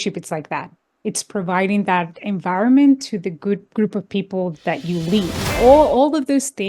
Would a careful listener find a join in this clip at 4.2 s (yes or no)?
no